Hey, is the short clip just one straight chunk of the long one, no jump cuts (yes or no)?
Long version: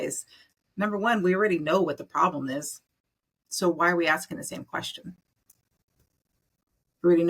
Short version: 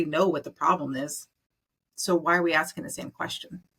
yes